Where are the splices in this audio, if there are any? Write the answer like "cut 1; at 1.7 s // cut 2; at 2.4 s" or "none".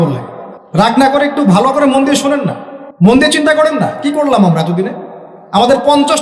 cut 1; at 0.9 s // cut 2; at 3.1 s